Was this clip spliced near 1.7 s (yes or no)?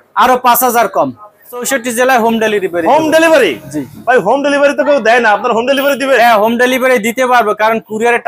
yes